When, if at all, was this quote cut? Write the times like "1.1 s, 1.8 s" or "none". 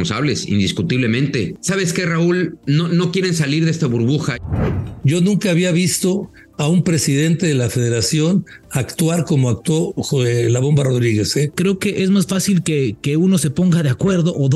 1.5 s, 2.6 s, 4.4 s, 11.5 s